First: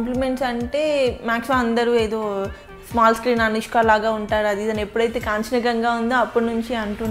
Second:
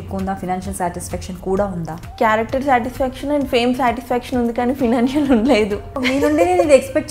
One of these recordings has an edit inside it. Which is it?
second; 2 cuts; at 2.0 s, 6.0 s

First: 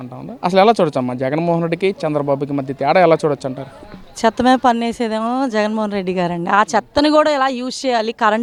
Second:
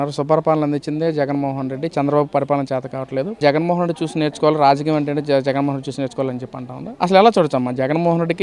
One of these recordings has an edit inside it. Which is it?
second; 1 cut; at 3.4 s

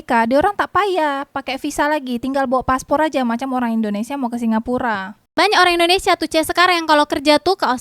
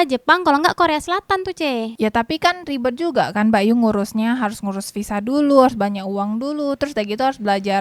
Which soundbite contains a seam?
first; 1 cut; at 5.3 s

